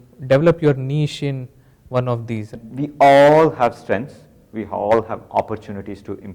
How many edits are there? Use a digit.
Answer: 1